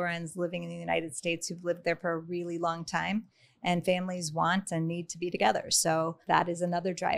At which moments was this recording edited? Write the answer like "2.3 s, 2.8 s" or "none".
6.2 s